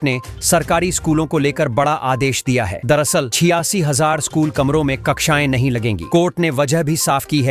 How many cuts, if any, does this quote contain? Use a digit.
0